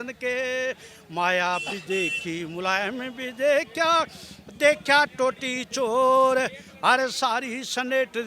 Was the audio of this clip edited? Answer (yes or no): no